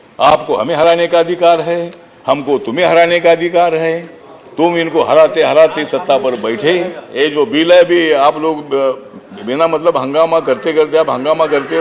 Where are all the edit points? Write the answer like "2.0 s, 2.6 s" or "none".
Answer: 7.0 s